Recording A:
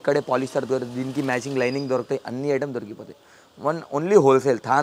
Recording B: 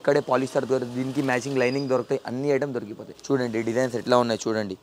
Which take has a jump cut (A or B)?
B